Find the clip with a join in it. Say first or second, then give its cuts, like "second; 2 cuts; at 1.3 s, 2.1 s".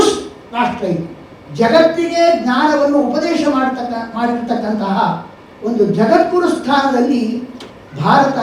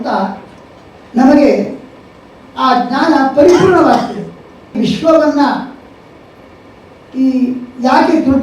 second; 1 cut; at 4.8 s